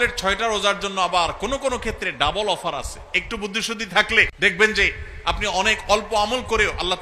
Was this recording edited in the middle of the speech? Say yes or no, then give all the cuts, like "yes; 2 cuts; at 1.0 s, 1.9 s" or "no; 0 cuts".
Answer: yes; 1 cut; at 4.3 s